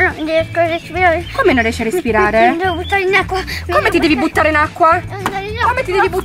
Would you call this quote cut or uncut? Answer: uncut